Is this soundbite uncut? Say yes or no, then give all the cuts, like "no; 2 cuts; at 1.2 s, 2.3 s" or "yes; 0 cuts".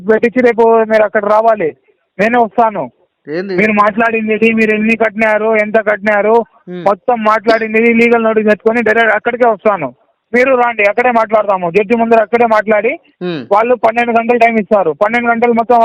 yes; 0 cuts